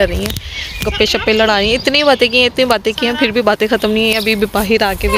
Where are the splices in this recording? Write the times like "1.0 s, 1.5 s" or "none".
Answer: none